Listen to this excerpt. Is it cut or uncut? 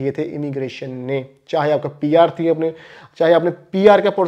uncut